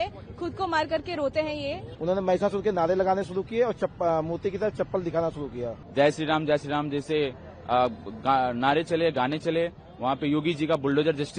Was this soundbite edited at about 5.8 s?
yes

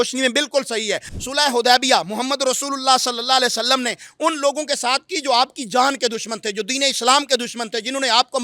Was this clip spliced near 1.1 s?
yes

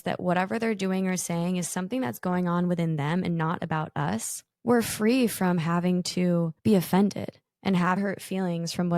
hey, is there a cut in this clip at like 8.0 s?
yes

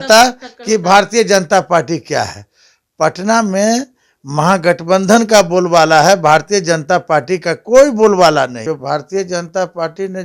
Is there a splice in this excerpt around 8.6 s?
yes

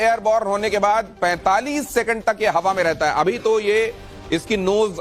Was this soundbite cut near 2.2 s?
yes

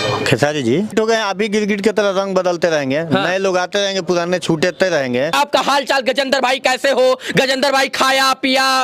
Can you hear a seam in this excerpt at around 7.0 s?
no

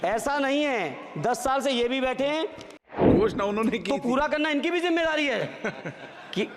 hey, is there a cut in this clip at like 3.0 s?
yes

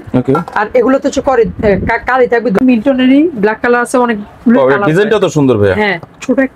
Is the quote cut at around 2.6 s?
yes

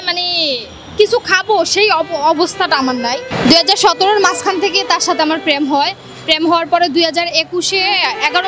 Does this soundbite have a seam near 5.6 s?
no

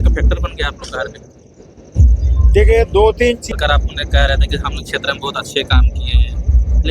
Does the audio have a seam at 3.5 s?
yes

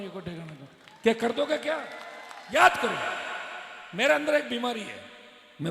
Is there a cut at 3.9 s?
no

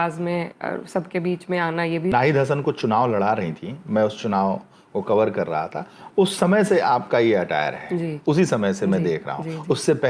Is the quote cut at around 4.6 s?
no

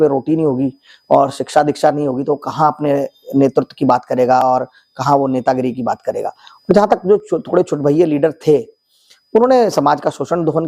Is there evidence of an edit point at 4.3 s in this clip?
no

